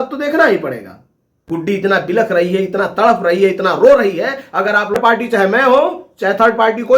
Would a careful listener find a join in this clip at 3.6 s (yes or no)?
no